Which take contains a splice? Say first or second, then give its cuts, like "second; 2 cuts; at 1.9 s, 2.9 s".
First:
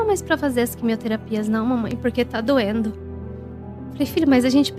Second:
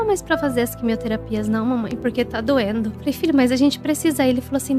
second; 1 cut; at 3.0 s